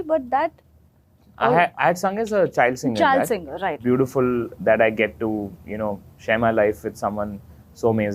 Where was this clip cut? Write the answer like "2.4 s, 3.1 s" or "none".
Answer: 3.8 s